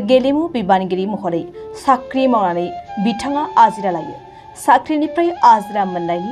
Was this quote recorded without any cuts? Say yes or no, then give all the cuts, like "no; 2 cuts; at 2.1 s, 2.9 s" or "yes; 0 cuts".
yes; 0 cuts